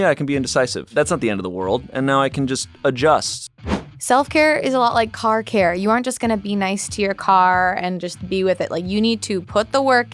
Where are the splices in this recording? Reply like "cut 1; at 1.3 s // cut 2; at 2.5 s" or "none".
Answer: cut 1; at 0.9 s // cut 2; at 3.6 s